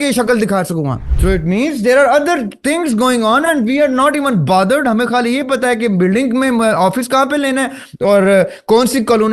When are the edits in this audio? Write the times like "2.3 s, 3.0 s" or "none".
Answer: 1.1 s